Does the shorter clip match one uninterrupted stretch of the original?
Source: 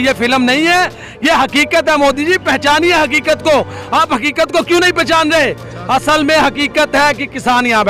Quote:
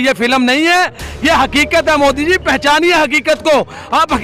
yes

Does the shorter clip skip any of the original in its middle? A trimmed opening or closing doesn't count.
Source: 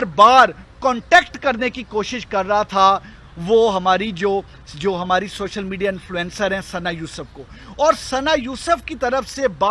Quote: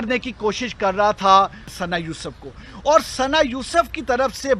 yes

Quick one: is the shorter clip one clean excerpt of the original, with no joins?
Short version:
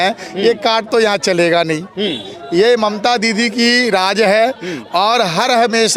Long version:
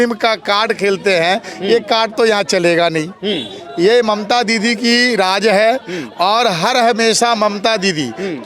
yes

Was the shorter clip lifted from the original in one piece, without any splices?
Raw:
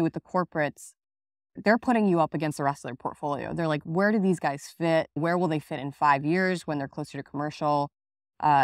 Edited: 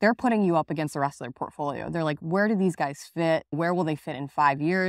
yes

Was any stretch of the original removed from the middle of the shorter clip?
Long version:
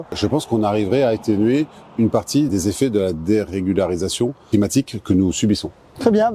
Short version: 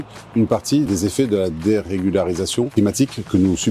yes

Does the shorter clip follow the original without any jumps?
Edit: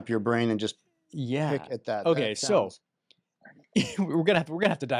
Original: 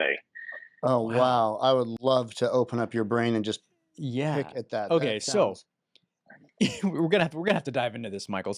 yes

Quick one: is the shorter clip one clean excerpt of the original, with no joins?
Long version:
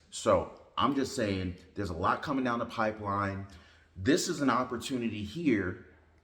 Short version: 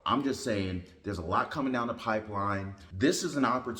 no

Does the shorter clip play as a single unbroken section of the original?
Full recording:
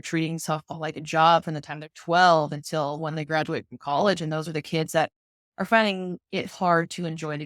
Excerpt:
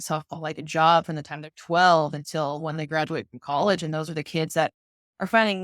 yes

